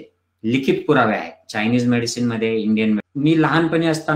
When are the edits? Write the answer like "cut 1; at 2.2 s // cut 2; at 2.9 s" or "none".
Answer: cut 1; at 3.1 s